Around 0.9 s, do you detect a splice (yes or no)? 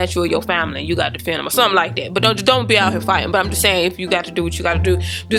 no